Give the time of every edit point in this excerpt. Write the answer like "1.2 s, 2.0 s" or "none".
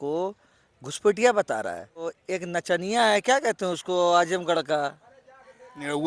2.2 s